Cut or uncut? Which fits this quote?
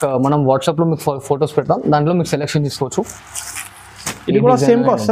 uncut